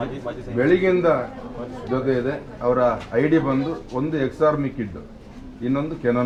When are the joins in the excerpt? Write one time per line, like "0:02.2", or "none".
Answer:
none